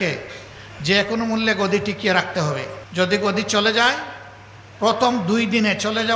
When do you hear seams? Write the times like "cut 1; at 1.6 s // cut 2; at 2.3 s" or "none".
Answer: cut 1; at 2.8 s